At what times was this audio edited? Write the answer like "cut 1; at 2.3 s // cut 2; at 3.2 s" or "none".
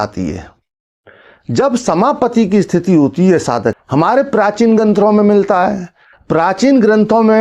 cut 1; at 3.8 s